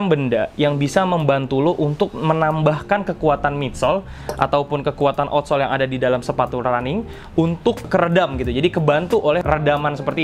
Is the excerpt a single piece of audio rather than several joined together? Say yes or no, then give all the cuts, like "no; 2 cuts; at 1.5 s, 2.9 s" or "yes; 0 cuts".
no; 2 cuts; at 7.9 s, 9.4 s